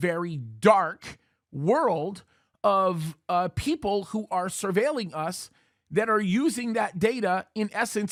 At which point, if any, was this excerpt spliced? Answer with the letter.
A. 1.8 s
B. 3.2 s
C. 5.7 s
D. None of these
D